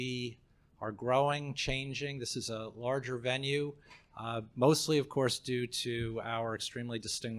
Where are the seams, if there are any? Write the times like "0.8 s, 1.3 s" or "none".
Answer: 4.8 s

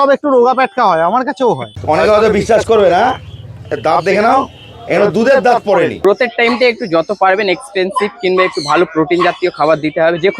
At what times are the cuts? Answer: 1.7 s, 6.0 s

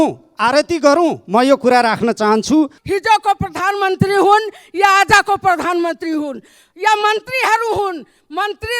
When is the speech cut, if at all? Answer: 2.8 s

